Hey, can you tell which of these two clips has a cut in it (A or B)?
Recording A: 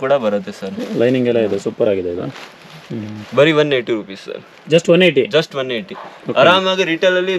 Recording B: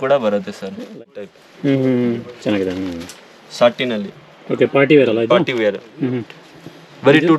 B